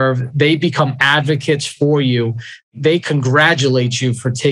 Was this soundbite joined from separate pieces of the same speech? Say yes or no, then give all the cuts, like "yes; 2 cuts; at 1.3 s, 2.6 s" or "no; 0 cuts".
yes; 1 cut; at 2.7 s